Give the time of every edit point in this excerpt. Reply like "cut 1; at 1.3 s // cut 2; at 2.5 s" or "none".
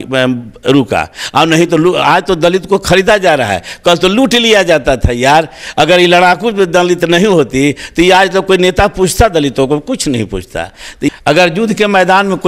cut 1; at 11.1 s